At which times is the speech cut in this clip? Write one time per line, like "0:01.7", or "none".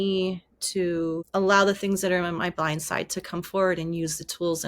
0:01.2

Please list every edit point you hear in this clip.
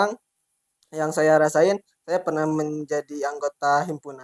none

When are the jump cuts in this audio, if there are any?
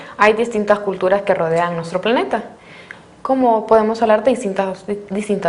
0:01.9

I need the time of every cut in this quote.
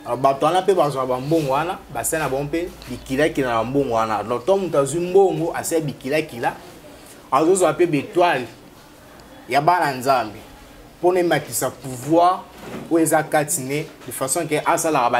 none

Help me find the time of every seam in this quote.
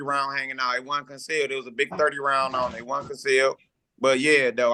none

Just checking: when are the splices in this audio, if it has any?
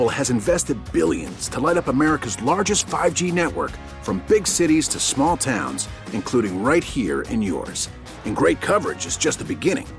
none

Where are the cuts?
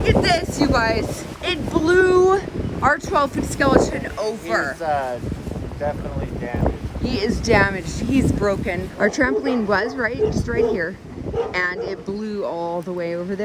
0:01.3
0:08.9

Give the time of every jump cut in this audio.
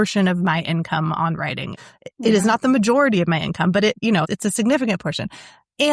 0:01.7
0:04.0

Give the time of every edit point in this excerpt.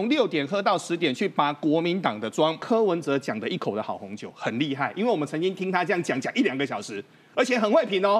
0:02.6

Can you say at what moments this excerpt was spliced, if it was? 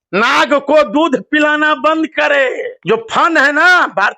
0:02.7

